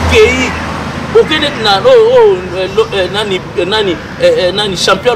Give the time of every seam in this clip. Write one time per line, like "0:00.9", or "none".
none

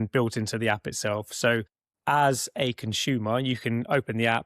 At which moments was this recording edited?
0:01.9

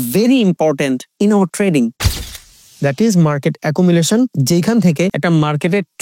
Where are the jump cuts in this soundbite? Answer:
0:02.4
0:04.4
0:05.2

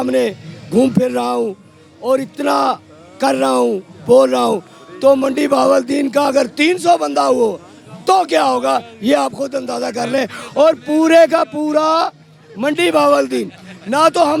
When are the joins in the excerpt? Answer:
none

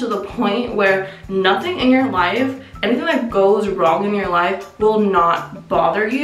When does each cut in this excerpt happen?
none

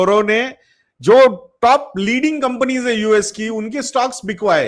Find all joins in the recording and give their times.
none

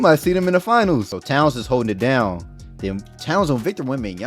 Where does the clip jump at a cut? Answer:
0:01.2

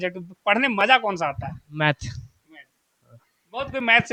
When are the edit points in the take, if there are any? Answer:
none

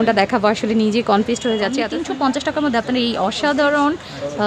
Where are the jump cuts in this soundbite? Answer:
0:01.8

